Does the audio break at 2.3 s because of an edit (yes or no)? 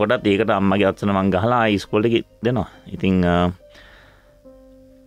no